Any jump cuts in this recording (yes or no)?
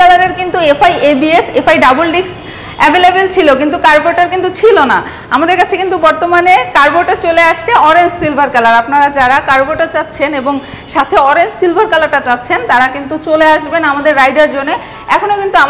no